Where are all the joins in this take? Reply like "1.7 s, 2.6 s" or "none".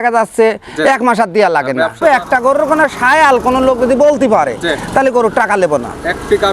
2.0 s